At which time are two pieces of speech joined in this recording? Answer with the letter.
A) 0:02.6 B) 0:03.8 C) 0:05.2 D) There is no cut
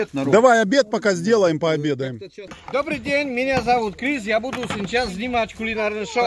A